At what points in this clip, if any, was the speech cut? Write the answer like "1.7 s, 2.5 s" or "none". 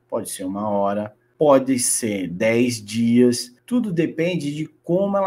1.2 s, 3.5 s